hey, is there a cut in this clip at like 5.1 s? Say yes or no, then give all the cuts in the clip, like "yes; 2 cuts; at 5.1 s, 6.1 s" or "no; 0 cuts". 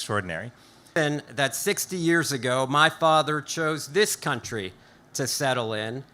no; 1 cut; at 1.0 s